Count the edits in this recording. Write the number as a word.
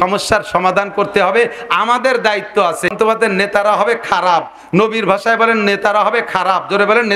one